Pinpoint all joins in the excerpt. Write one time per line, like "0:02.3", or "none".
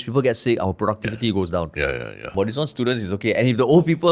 none